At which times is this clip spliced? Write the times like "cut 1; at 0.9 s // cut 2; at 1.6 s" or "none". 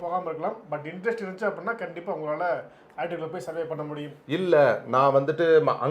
cut 1; at 4.1 s